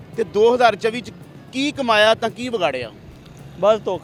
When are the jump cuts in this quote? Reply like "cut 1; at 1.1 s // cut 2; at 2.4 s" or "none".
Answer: none